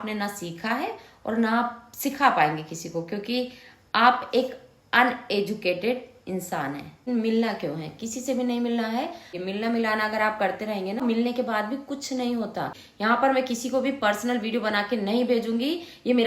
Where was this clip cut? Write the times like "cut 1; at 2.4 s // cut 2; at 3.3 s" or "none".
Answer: cut 1; at 7.0 s // cut 2; at 9.4 s // cut 3; at 11.0 s // cut 4; at 12.8 s